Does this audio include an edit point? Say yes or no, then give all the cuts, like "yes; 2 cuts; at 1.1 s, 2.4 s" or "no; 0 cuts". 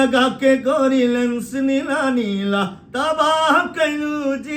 no; 0 cuts